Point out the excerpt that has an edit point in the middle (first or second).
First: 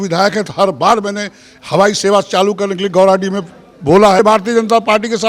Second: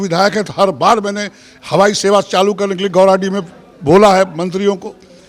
first